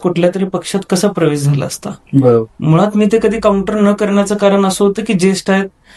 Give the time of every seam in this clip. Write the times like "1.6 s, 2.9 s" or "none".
none